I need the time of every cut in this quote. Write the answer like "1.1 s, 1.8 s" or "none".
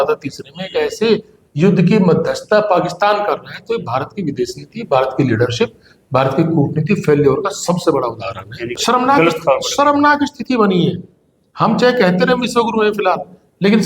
8.8 s